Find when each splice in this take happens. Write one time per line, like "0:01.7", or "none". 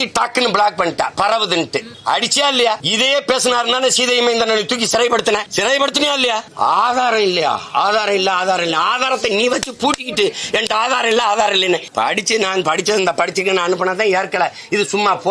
0:01.9
0:02.9
0:05.5
0:06.5
0:11.9